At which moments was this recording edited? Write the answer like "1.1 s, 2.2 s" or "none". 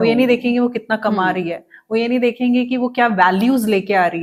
none